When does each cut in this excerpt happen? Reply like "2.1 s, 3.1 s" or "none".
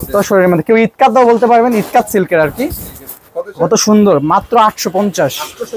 none